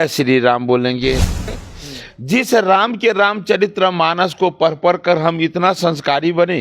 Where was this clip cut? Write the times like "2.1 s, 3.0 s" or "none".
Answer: 1.5 s